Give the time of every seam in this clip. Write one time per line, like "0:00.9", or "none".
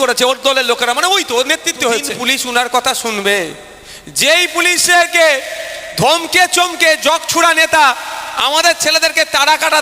0:02.1